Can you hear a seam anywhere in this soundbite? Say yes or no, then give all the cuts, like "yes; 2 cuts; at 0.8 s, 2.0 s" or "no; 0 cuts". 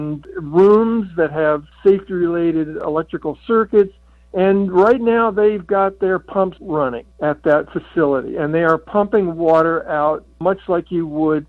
yes; 3 cuts; at 1.7 s, 2.8 s, 6.7 s